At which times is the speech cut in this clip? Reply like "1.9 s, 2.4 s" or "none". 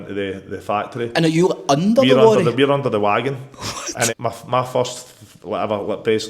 4.1 s